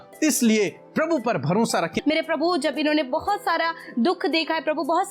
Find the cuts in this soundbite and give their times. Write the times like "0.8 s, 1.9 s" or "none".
1.9 s